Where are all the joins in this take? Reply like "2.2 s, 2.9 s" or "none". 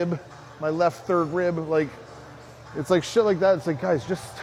none